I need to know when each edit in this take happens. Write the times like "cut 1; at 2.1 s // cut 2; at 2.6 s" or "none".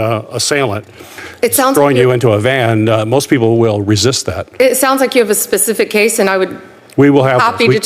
cut 1; at 1.2 s